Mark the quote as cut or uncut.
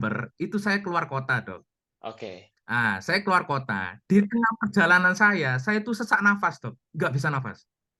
uncut